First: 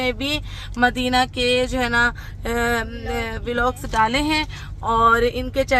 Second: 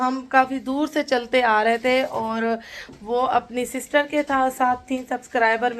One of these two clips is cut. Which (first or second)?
second